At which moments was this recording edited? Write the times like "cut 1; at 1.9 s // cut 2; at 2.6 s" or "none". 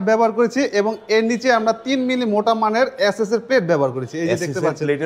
none